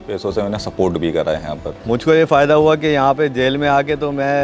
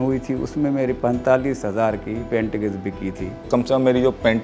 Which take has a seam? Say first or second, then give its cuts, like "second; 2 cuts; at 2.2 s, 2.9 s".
second; 3 cuts; at 1.0 s, 2.2 s, 3.4 s